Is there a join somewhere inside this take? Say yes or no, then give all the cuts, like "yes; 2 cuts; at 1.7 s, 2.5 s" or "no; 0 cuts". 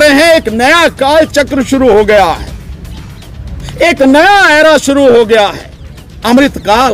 no; 0 cuts